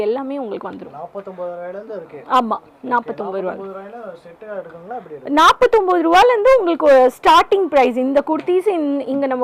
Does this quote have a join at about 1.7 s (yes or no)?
no